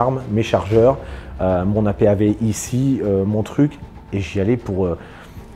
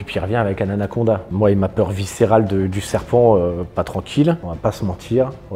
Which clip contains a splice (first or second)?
second